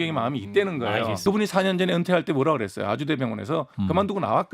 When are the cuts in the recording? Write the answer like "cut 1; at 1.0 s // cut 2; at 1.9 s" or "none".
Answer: cut 1; at 1.2 s

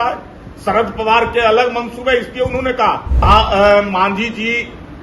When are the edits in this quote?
cut 1; at 3.2 s

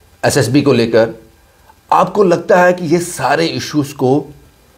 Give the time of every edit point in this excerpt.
none

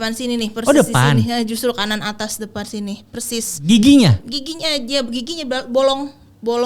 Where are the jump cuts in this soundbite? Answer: none

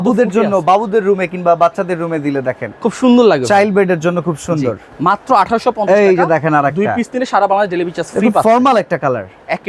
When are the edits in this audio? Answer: none

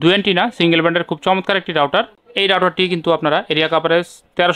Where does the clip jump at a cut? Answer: none

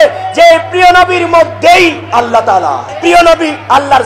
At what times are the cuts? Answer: cut 1; at 2.9 s

